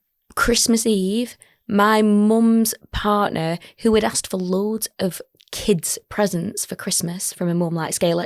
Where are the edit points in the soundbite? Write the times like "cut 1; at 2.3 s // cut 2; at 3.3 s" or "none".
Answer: none